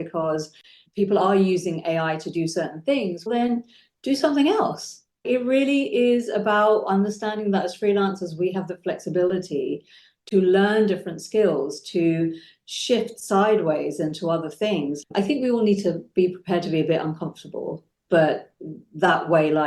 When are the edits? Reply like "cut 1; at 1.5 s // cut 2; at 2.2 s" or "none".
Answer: cut 1; at 5.2 s // cut 2; at 15.0 s